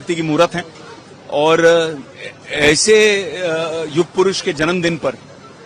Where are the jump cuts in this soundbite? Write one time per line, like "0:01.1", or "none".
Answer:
none